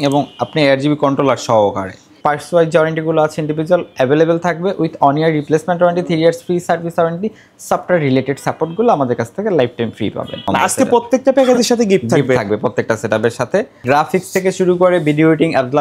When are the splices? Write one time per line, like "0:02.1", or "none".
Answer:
0:02.1
0:10.4
0:13.8